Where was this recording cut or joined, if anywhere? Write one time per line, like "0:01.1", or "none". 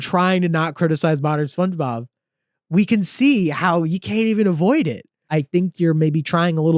0:05.2